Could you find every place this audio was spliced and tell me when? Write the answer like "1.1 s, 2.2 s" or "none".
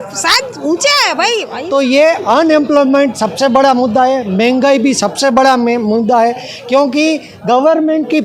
1.5 s